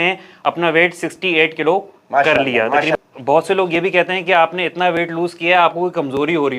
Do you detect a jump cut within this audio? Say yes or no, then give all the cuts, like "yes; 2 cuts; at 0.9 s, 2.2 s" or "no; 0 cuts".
yes; 1 cut; at 2.9 s